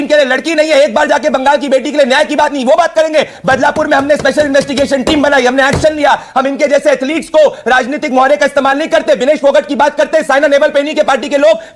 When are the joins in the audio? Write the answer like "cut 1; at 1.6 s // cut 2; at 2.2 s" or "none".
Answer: none